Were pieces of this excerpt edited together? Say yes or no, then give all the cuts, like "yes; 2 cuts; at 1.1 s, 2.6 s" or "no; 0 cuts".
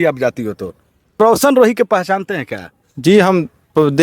yes; 1 cut; at 1.2 s